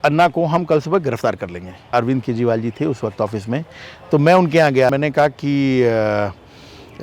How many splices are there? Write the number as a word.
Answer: two